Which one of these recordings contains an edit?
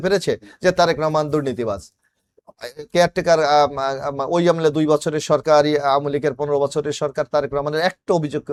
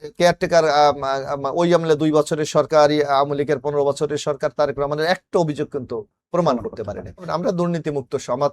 second; 1 cut; at 7.3 s

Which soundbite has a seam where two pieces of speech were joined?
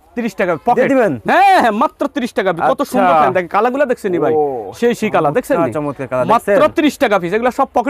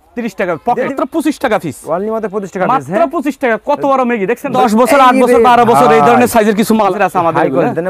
second; 3 cuts; at 0.9 s, 4.6 s, 6.9 s

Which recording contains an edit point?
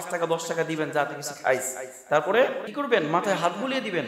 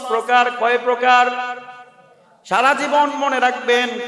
first; 1 cut; at 2.7 s

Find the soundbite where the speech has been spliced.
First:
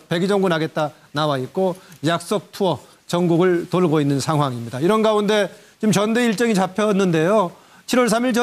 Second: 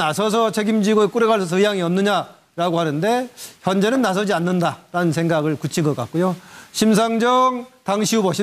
second; 1 cut; at 2.4 s

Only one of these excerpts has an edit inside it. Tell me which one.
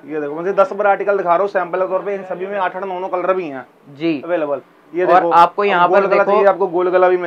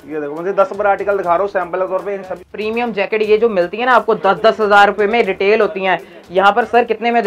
second; 1 cut; at 2.5 s

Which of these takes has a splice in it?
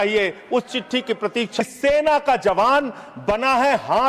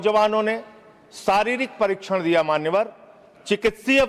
first; 1 cut; at 1.6 s

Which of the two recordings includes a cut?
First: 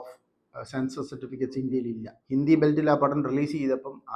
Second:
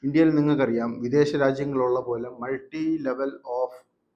first; 1 cut; at 2.1 s

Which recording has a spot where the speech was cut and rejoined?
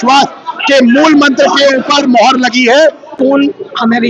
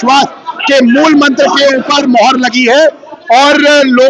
first; 1 cut; at 3.1 s

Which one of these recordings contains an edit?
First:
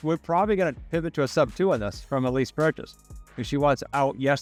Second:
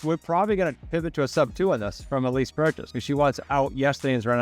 second; 1 cut; at 2.9 s

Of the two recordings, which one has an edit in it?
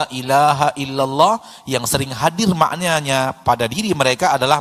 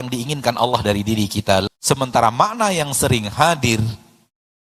second; 1 cut; at 1.6 s

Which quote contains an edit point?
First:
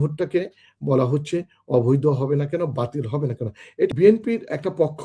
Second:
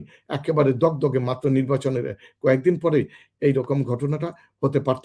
first; 1 cut; at 3.9 s

